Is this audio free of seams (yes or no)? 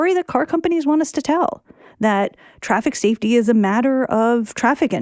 yes